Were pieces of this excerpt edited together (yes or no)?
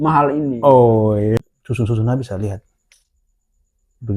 yes